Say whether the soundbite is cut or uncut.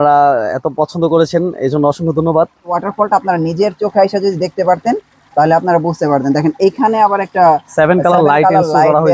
cut